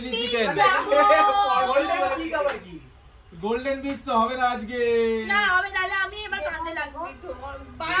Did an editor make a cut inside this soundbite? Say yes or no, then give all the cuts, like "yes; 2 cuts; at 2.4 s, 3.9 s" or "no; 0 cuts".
no; 0 cuts